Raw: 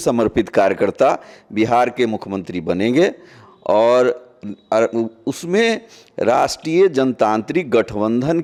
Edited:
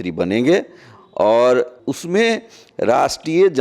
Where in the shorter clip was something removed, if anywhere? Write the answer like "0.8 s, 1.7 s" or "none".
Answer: 1.8 s